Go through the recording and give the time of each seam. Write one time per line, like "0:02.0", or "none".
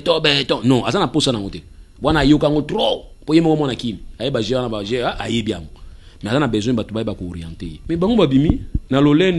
0:07.8